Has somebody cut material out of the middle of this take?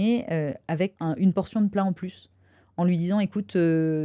yes; 1 cut; at 1.0 s

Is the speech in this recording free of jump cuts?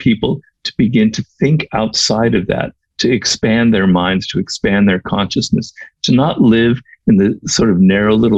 yes; 0 cuts

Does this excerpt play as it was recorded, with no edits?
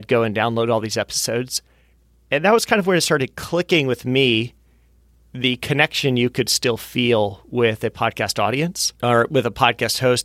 no; 1 cut; at 8.9 s

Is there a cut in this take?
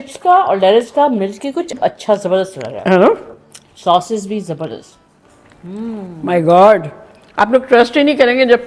no; 0 cuts

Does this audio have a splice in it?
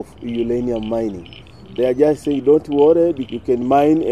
yes; 1 cut; at 3.2 s

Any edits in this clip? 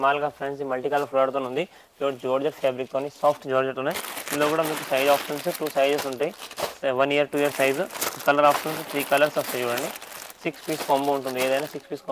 no; 0 cuts

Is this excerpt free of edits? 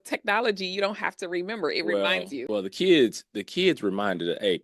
no; 1 cut; at 2.4 s

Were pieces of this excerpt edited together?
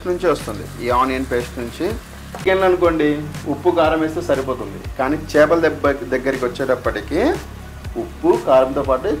yes; 1 cut; at 2.4 s

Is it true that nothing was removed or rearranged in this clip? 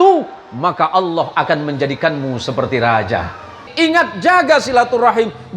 no; 1 cut; at 3.7 s

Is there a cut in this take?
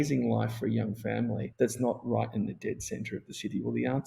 yes; 1 cut; at 1.4 s

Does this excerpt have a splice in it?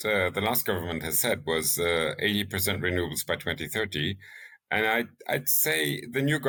no; 0 cuts

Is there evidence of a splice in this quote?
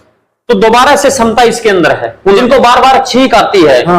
yes; 1 cut; at 2.4 s

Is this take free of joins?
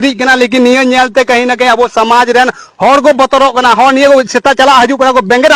yes; 0 cuts

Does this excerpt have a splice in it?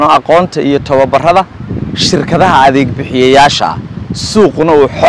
no; 0 cuts

